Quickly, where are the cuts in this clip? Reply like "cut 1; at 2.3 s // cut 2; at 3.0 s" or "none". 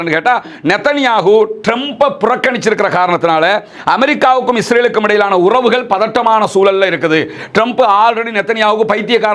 none